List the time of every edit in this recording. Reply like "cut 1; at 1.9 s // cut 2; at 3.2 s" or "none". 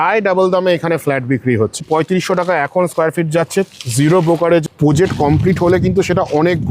cut 1; at 1.8 s // cut 2; at 4.6 s